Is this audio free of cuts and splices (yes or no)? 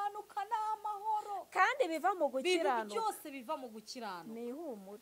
yes